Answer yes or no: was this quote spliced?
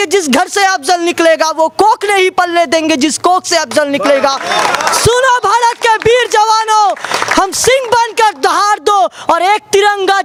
no